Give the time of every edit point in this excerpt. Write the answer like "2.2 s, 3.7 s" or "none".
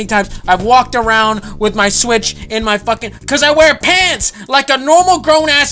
4.3 s